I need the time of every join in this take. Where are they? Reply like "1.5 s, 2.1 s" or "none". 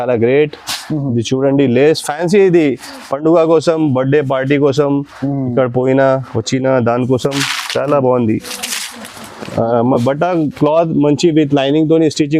none